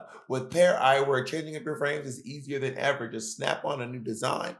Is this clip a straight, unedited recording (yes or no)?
yes